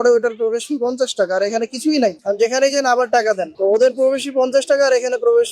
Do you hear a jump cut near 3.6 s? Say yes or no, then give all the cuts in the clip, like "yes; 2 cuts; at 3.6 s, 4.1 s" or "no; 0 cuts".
no; 1 cut; at 2.2 s